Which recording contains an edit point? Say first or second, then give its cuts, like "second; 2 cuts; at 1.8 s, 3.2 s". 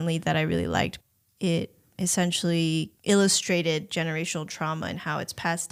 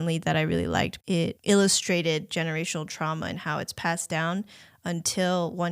second; 1 cut; at 1.3 s